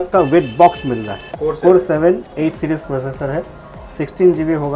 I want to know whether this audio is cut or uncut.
cut